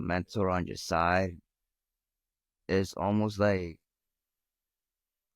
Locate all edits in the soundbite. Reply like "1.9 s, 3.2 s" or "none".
none